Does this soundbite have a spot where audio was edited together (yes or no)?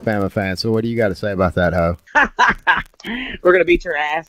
yes